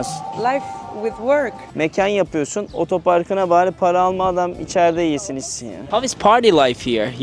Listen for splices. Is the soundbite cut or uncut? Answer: cut